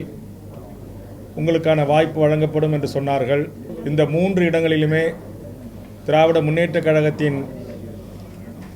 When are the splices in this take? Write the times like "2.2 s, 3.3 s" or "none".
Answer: 3.6 s